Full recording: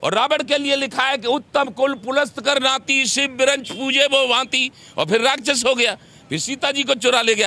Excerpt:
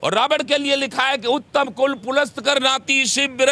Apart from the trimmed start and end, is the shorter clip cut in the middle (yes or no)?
no